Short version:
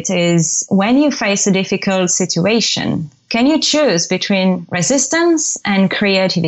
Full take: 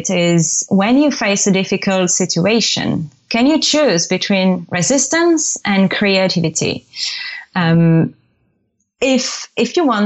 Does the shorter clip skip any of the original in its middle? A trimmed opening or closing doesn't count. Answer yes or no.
no